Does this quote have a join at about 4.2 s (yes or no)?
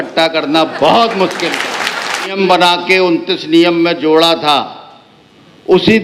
no